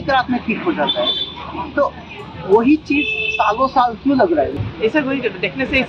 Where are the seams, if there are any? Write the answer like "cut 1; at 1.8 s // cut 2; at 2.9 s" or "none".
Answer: none